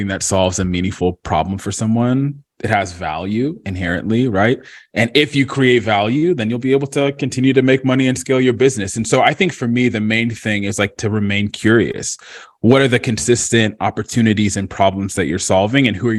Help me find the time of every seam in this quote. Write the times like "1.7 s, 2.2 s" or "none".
none